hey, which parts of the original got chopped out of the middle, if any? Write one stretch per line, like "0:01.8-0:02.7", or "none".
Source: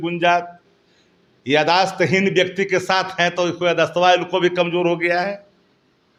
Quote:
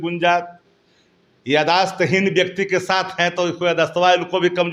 none